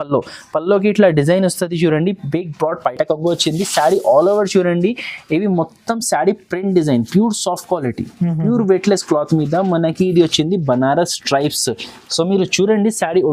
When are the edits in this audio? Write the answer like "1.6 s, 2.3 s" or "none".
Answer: none